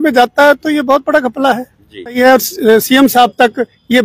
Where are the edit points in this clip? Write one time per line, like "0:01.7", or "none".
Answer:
0:02.2